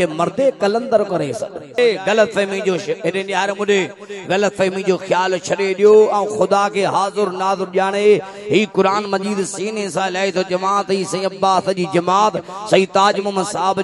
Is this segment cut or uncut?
cut